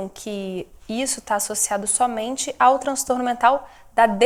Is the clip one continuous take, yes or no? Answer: yes